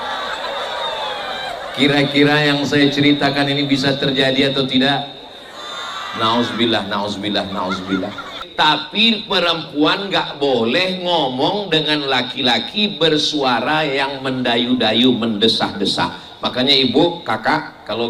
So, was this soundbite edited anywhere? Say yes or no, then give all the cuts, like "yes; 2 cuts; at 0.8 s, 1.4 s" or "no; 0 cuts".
yes; 1 cut; at 8.4 s